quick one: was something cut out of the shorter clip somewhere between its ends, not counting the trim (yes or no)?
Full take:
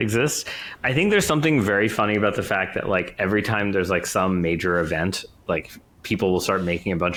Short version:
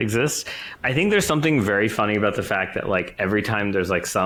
no